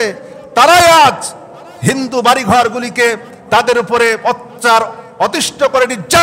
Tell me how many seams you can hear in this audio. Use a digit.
0